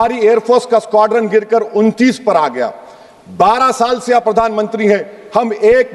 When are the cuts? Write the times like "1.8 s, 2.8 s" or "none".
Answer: none